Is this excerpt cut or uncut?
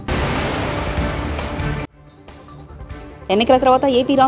cut